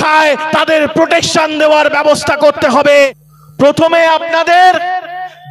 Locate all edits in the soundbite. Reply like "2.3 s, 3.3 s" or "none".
3.2 s